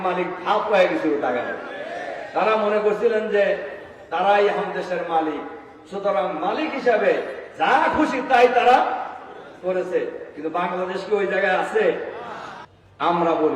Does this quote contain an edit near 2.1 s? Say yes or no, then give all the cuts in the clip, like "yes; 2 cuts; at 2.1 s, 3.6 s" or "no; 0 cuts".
no; 0 cuts